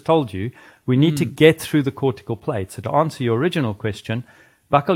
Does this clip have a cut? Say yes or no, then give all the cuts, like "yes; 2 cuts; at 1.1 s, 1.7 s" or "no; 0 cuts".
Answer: no; 0 cuts